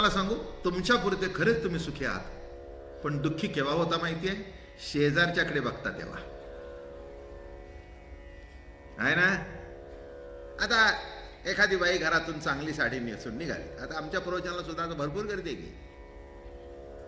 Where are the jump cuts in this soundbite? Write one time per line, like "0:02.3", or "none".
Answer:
none